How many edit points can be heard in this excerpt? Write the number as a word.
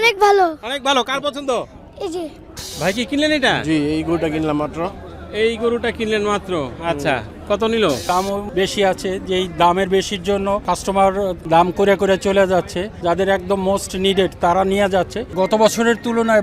six